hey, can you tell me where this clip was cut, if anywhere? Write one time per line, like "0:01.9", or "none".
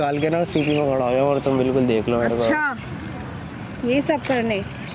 none